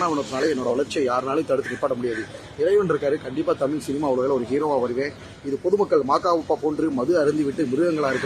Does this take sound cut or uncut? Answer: uncut